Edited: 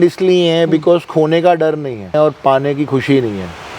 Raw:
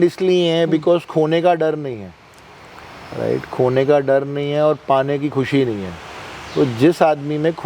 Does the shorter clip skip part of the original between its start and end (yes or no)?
yes